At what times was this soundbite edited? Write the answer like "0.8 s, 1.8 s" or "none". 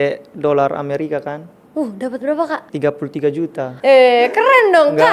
3.7 s